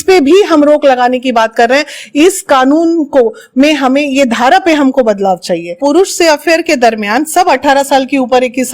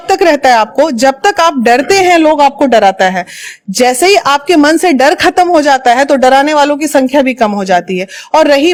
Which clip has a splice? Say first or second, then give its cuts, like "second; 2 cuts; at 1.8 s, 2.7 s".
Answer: first; 1 cut; at 5.7 s